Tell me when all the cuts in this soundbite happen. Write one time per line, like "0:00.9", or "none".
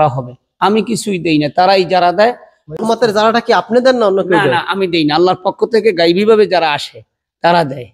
0:02.7